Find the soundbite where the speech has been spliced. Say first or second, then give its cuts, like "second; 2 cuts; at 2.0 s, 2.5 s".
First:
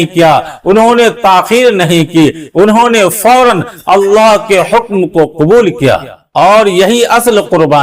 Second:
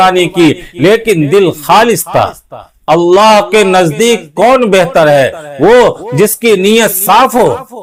first; 1 cut; at 6.2 s